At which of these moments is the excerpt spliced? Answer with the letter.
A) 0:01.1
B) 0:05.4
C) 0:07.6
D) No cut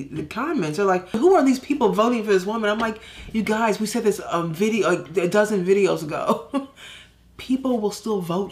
A